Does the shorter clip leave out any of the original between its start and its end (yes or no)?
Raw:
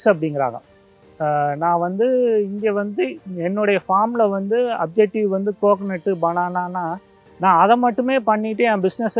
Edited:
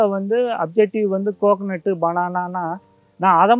no